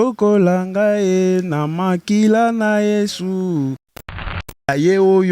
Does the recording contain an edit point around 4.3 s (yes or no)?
yes